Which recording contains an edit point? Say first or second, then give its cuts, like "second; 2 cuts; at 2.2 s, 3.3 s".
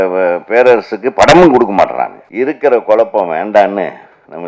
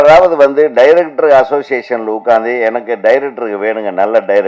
first; 1 cut; at 2.2 s